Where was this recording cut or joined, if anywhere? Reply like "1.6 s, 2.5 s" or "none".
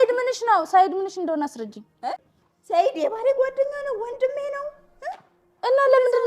2.2 s